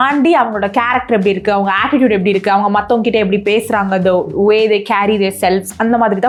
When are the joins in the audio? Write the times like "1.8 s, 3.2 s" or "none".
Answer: none